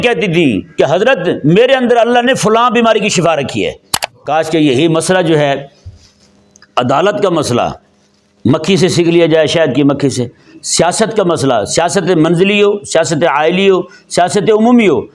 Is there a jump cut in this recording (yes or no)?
yes